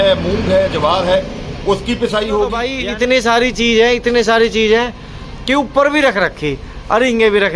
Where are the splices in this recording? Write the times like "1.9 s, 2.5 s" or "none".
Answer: 2.7 s